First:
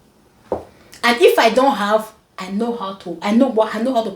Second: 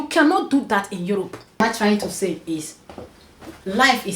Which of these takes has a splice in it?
second; 1 cut; at 1.6 s

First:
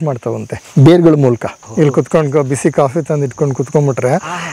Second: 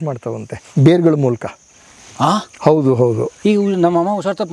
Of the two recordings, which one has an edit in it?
first; 1 cut; at 1.6 s

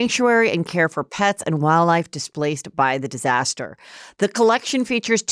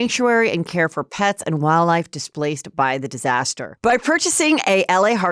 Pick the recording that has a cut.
second; 1 cut; at 3.7 s

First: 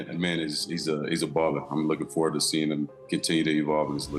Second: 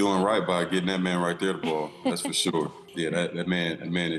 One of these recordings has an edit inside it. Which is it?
second; 1 cut; at 2.8 s

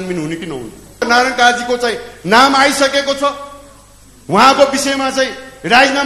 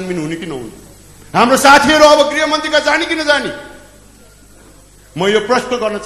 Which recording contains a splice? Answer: first; 1 cut; at 1.0 s

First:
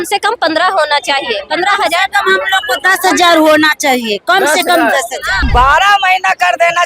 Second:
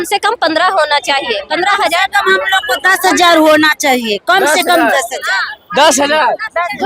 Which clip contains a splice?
first; 1 cut; at 5.5 s

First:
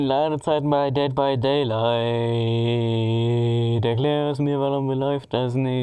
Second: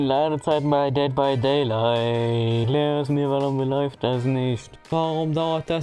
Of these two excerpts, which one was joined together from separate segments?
second; 2 cuts; at 2.6 s, 4.8 s

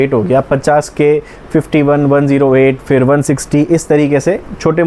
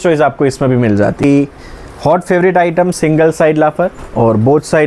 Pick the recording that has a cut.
second; 1 cut; at 1.2 s

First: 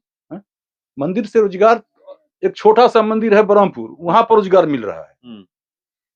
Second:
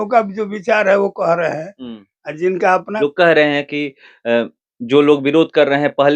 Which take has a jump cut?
second; 1 cut; at 3.0 s

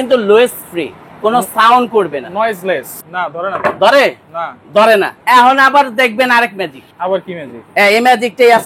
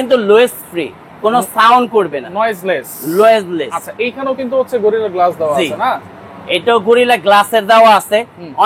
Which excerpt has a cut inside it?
first; 3 cuts; at 2.9 s, 5.2 s, 6.8 s

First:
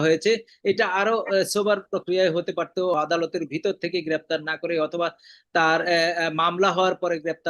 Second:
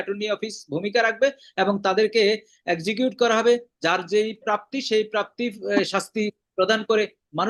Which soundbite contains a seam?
first; 1 cut; at 2.9 s

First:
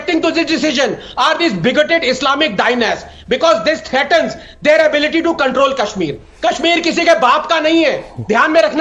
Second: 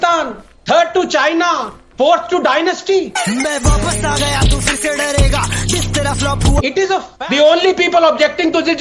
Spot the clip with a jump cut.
second; 1 cut; at 7.1 s

